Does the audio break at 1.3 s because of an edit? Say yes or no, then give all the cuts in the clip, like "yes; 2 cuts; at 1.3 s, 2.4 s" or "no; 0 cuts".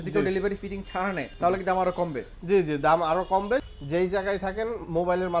yes; 2 cuts; at 1.3 s, 3.7 s